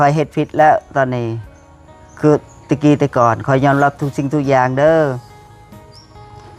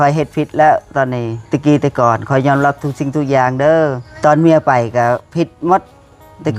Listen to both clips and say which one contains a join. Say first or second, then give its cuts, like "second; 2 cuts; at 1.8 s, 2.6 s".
second; 2 cuts; at 1.4 s, 4.1 s